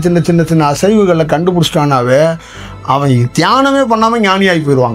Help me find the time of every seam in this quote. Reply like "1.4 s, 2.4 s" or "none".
none